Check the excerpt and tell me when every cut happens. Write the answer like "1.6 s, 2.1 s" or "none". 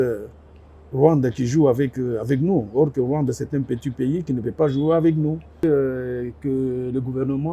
5.6 s